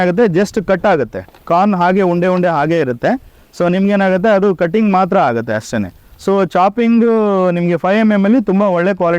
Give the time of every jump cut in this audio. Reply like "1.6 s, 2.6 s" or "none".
none